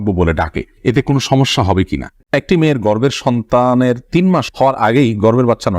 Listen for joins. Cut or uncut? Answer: cut